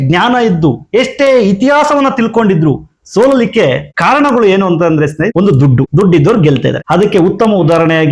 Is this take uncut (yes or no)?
no